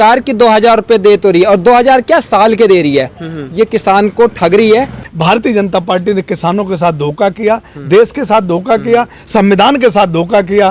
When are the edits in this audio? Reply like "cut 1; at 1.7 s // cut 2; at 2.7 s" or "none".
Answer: cut 1; at 5.0 s